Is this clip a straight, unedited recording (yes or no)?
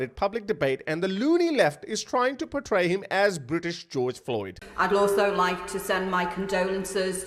yes